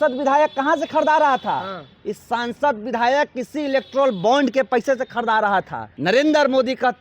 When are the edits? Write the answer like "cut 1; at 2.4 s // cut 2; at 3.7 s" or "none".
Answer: cut 1; at 5.9 s